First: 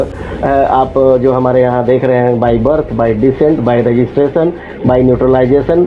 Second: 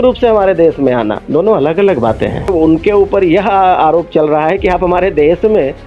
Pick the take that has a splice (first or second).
second